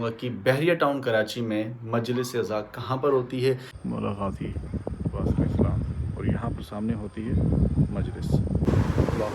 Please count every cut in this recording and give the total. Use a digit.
2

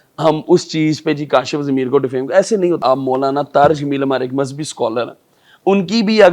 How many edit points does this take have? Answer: 1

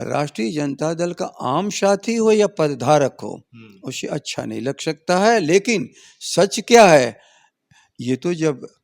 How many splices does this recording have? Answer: 0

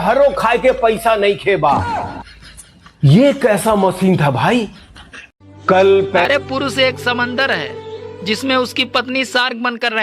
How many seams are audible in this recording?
1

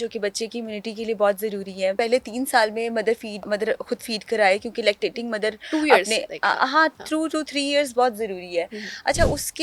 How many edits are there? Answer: 2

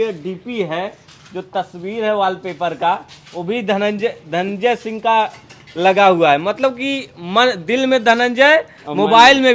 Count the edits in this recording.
0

